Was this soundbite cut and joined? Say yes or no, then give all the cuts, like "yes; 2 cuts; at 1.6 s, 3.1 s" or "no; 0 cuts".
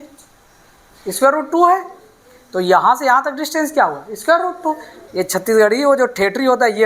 yes; 1 cut; at 4.9 s